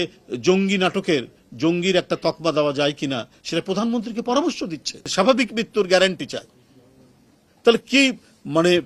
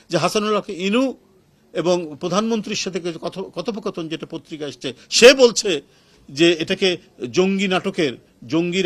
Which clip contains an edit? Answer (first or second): first